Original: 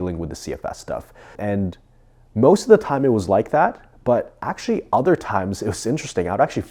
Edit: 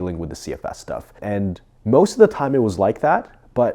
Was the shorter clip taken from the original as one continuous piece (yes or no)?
no